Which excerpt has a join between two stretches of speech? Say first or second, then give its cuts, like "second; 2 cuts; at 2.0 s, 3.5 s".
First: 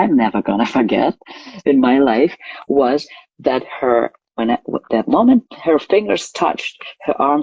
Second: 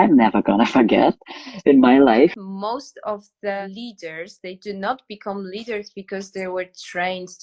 second; 2 cuts; at 2.5 s, 3.6 s